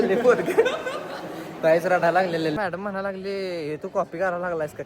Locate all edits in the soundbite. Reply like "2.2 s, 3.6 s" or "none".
2.6 s